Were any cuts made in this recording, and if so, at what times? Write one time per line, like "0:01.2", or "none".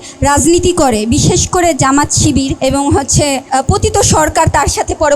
0:02.5
0:03.5